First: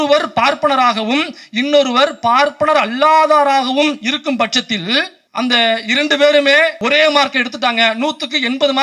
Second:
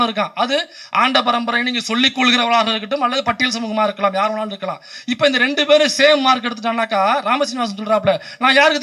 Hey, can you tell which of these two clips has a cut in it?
first; 2 cuts; at 5.2 s, 6.8 s

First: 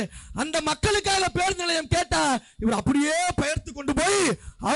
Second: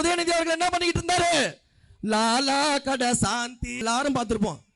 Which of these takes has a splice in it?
second; 1 cut; at 3.8 s

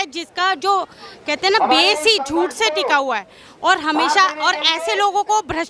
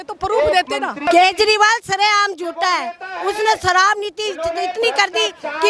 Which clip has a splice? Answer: second; 1 cut; at 1.1 s

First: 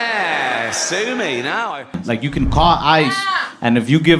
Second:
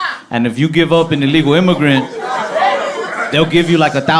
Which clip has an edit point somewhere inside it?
first; 1 cut; at 1.9 s

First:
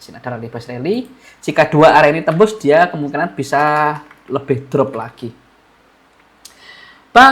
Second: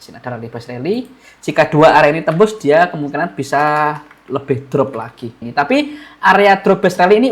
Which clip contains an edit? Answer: second; 1 cut; at 5.4 s

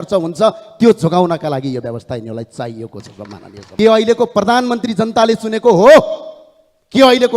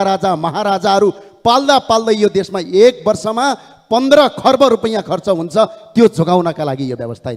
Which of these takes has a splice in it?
first; 1 cut; at 3.6 s

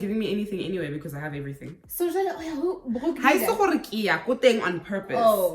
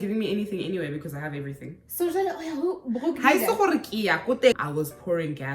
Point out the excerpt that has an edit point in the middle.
second; 1 cut; at 4.5 s

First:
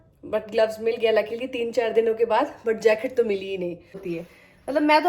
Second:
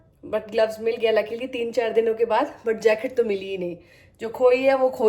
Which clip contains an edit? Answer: first; 1 cut; at 4.1 s

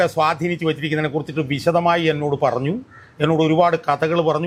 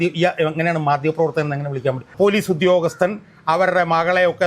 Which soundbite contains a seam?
second; 1 cut; at 2.1 s

